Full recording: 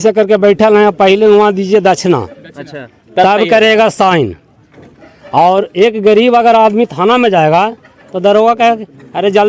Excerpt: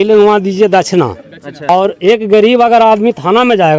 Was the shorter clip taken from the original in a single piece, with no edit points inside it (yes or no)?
no